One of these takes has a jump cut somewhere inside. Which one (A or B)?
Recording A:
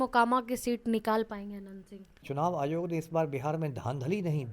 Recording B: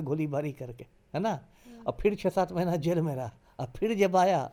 A